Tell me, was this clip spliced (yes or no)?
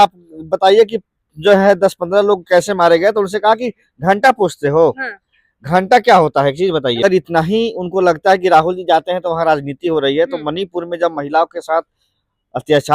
yes